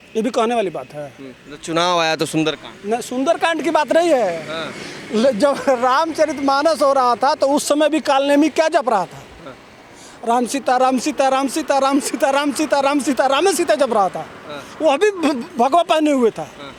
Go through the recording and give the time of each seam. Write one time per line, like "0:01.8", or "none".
none

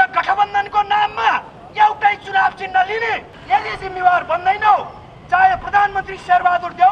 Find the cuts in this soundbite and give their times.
0:03.3

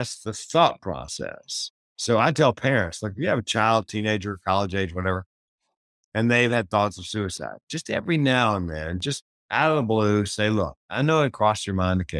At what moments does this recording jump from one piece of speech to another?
0:09.3

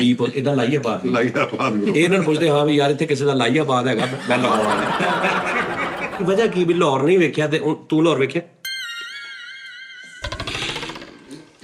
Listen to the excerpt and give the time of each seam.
0:06.2

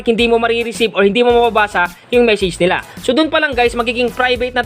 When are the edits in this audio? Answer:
0:02.8

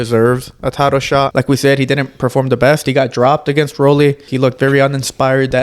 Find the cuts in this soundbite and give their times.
0:01.3
0:04.3

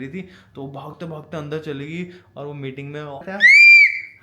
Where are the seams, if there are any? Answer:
0:03.2

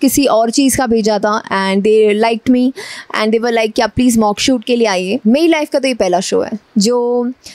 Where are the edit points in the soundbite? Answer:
0:05.1

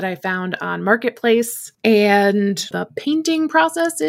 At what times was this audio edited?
0:01.6
0:02.7

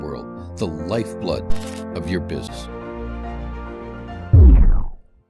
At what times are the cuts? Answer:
0:02.5

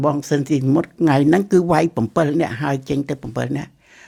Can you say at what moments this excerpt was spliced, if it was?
none

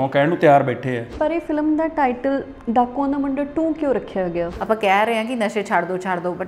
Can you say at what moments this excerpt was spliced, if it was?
0:01.1
0:04.5

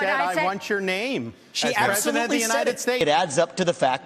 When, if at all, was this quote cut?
0:03.0

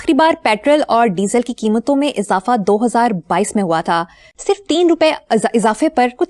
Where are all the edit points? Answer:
0:04.3

